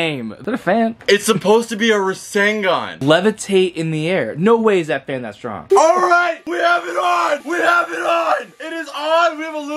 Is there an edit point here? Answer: yes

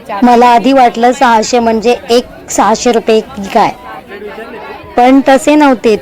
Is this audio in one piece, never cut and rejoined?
yes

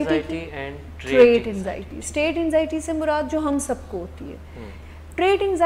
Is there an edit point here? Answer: yes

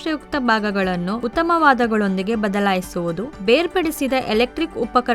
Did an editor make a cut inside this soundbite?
yes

